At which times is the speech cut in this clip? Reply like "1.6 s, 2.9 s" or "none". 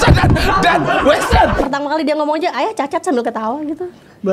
1.6 s